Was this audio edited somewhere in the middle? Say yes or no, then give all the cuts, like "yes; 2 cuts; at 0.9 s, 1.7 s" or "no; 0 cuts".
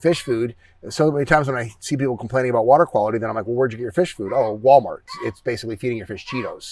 yes; 1 cut; at 5.0 s